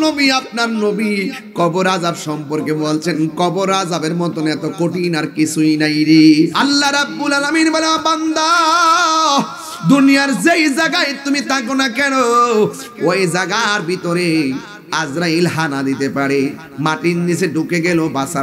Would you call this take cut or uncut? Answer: cut